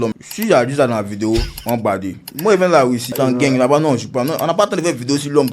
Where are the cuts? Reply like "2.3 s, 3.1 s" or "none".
2.3 s, 3.1 s